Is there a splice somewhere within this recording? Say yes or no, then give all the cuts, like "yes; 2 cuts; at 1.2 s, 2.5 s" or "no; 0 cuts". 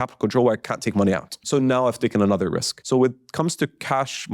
yes; 2 cuts; at 1.4 s, 2.7 s